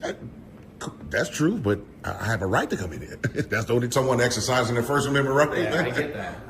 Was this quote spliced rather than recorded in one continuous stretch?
yes; 1 cut; at 3.9 s

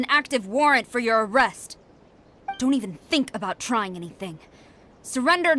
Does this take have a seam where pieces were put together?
no; 0 cuts

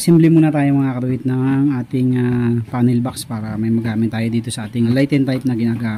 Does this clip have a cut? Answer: yes; 1 cut; at 4.9 s

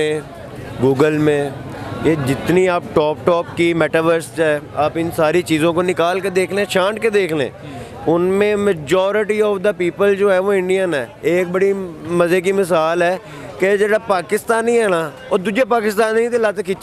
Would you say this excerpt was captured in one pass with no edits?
yes; 0 cuts

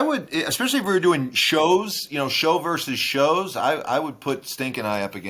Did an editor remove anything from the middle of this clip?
no; 0 cuts

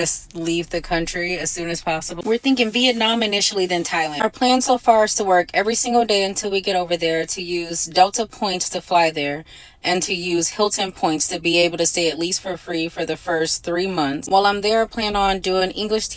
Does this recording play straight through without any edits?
yes; 0 cuts

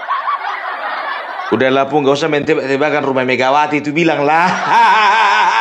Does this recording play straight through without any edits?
yes; 0 cuts

